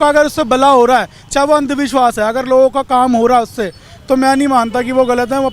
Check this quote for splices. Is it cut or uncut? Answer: uncut